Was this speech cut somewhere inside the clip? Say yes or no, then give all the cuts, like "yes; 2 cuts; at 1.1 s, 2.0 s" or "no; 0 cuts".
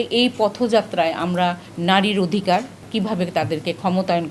yes; 2 cuts; at 1.7 s, 2.9 s